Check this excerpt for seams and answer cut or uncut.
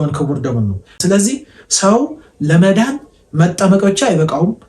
cut